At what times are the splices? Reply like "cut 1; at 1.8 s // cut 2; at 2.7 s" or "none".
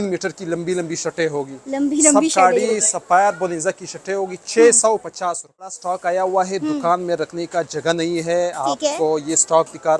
cut 1; at 5.9 s